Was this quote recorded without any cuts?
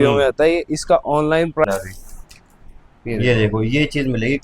no; 1 cut; at 1.7 s

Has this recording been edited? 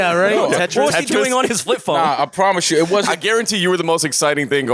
no; 0 cuts

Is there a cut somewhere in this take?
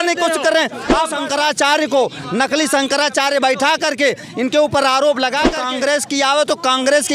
yes; 2 cuts; at 1.1 s, 5.6 s

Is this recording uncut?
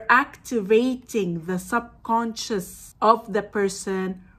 no; 1 cut; at 2.8 s

